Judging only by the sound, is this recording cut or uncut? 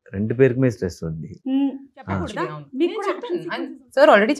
cut